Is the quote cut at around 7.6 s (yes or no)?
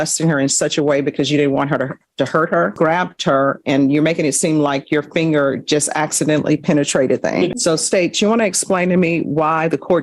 yes